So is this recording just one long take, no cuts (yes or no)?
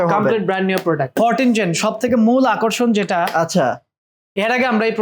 no